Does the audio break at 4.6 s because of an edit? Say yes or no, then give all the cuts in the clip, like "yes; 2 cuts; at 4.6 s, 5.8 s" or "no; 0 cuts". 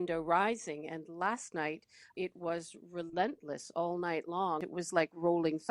yes; 1 cut; at 4.6 s